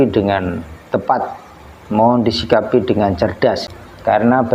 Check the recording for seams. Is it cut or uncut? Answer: cut